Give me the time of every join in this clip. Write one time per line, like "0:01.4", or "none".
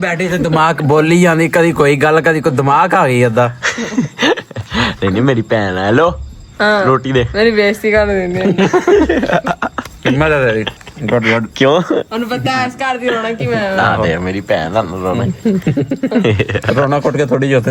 none